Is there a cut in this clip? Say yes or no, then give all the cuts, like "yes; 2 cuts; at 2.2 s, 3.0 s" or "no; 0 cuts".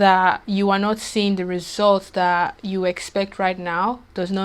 no; 0 cuts